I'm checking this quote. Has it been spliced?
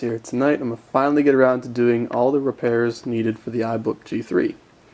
no; 0 cuts

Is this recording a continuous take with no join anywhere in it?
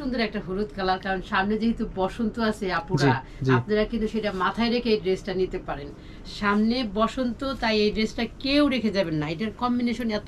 yes; 0 cuts

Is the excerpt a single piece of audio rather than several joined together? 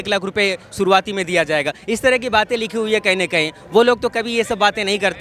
yes; 0 cuts

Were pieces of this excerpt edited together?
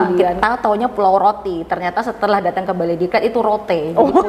no; 0 cuts

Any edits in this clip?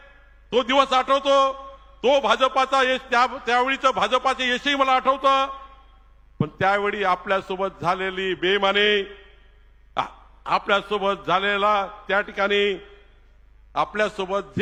no; 0 cuts

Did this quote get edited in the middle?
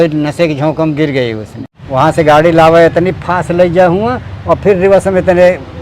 yes; 1 cut; at 1.5 s

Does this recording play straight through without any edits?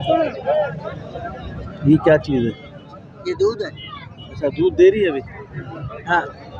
yes; 0 cuts

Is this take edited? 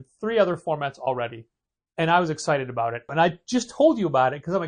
yes; 1 cut; at 3.1 s

